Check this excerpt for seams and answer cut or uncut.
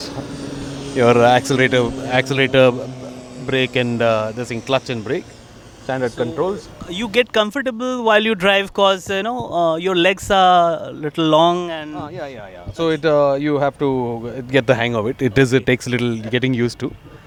uncut